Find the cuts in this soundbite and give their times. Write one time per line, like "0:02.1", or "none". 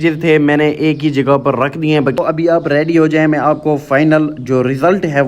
0:02.2